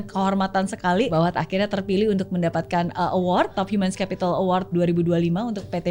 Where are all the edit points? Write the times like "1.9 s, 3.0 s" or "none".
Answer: 1.1 s, 3.6 s, 4.7 s